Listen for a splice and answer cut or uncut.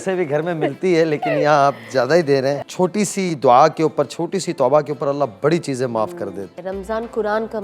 cut